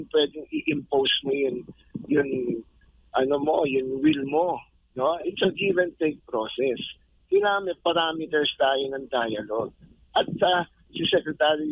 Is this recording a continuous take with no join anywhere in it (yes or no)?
yes